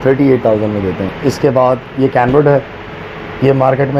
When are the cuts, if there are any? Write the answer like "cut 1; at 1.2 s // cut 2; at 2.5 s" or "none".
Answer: cut 1; at 1.1 s